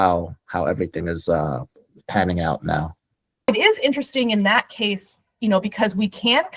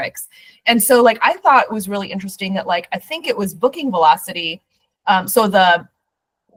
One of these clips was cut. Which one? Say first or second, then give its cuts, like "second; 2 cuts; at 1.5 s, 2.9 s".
first; 1 cut; at 3.5 s